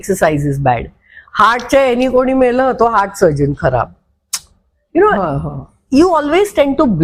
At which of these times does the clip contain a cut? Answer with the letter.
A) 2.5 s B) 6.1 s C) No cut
C